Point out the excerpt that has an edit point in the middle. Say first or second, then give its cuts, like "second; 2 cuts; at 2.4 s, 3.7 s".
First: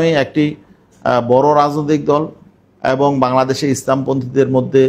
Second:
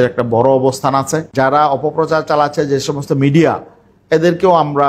second; 1 cut; at 1.3 s